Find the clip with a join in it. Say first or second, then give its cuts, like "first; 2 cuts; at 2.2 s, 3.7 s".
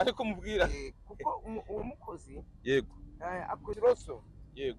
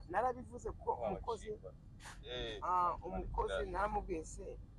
first; 1 cut; at 3.8 s